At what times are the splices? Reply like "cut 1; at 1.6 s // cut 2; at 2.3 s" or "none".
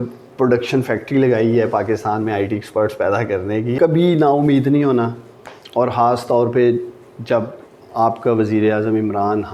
cut 1; at 3.7 s